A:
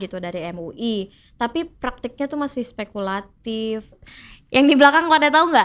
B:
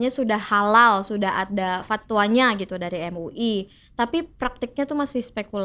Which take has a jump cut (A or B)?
A